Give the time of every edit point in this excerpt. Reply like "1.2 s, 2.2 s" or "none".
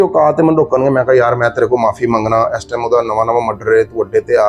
none

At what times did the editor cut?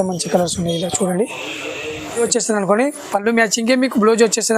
2.2 s

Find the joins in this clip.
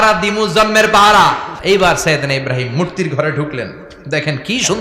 1.5 s

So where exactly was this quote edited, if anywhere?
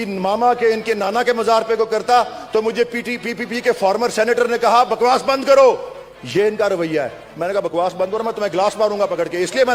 none

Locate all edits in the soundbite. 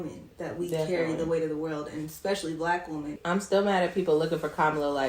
3.2 s

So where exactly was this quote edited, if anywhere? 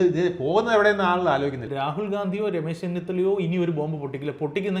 1.7 s

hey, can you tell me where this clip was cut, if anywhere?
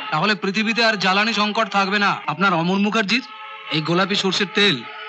2.2 s

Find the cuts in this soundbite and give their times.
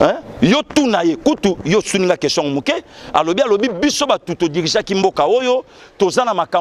none

